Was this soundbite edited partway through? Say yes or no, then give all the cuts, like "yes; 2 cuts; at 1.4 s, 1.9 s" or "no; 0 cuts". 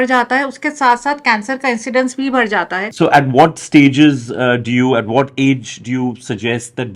yes; 1 cut; at 2.9 s